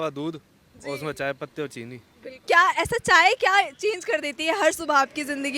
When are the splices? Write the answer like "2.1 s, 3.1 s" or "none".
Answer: 2.4 s